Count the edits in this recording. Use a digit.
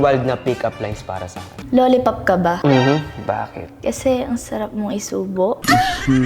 1